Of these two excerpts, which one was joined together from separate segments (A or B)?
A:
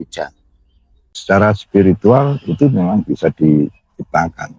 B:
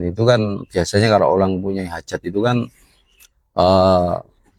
A